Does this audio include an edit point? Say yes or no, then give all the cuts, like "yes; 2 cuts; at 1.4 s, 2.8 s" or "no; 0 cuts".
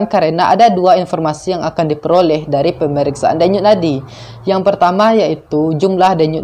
no; 0 cuts